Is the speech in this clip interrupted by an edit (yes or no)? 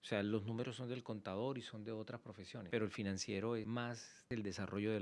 yes